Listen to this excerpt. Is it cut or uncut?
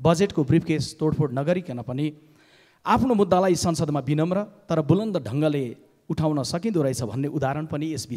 uncut